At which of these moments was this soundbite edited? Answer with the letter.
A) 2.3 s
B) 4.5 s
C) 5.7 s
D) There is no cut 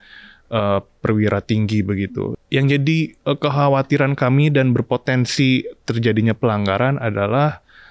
A